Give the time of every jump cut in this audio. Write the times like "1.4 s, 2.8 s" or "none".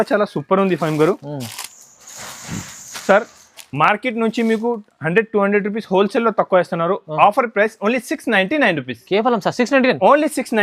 none